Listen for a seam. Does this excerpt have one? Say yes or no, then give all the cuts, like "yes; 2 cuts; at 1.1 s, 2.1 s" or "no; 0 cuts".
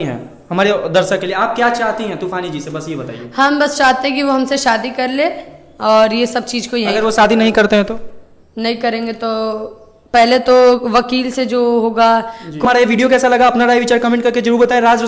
no; 0 cuts